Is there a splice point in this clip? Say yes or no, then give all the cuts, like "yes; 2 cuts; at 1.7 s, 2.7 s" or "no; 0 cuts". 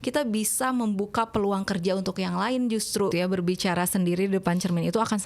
yes; 1 cut; at 3.1 s